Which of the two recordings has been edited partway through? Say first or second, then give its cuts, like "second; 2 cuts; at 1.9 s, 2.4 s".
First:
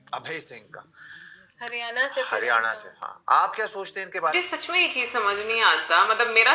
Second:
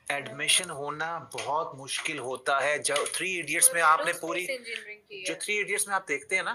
first; 1 cut; at 4.3 s